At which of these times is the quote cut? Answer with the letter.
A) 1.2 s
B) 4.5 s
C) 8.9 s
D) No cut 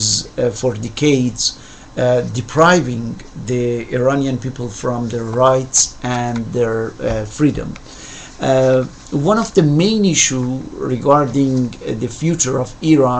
B